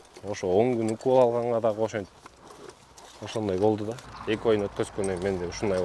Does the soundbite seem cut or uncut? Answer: cut